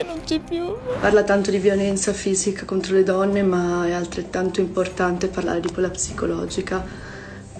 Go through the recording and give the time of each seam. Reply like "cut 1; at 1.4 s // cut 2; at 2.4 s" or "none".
cut 1; at 0.9 s